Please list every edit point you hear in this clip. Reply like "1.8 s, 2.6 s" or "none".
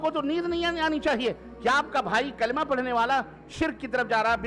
none